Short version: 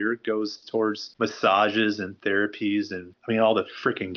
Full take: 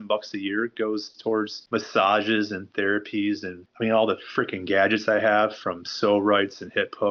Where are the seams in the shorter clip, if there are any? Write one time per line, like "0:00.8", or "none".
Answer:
none